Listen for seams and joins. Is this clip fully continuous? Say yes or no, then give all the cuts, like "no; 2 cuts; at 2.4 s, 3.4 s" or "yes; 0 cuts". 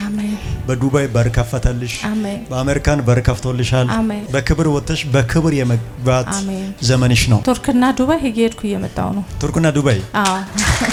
yes; 0 cuts